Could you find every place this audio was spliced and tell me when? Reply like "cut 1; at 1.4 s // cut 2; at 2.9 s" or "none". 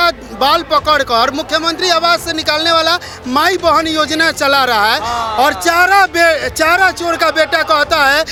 none